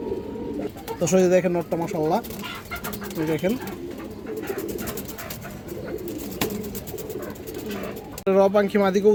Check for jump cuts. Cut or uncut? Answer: uncut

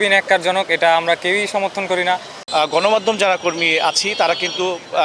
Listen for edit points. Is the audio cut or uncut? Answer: cut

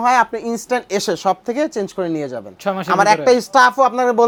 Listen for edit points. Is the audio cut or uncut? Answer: uncut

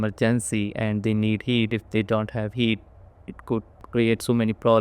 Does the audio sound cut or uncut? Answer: cut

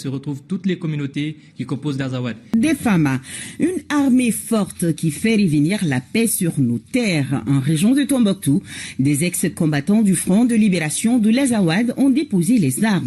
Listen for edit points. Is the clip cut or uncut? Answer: cut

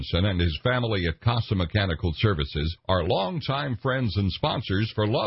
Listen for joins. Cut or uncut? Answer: uncut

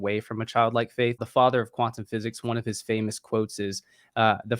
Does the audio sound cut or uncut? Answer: cut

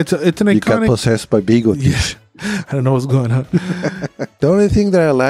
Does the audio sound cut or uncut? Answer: cut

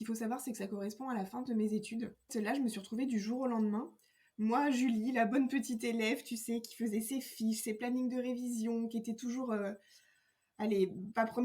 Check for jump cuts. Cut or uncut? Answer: cut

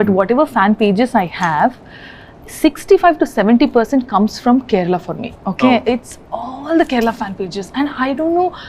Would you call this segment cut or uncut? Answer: uncut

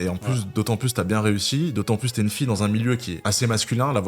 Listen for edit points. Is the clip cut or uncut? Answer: cut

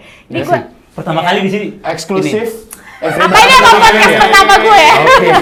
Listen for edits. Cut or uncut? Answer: uncut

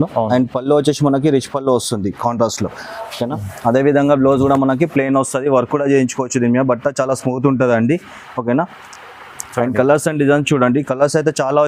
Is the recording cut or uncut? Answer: uncut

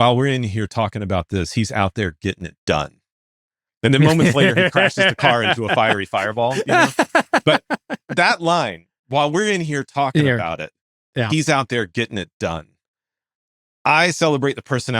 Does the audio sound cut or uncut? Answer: uncut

